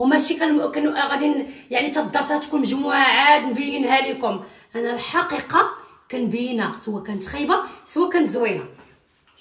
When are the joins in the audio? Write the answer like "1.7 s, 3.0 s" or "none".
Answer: none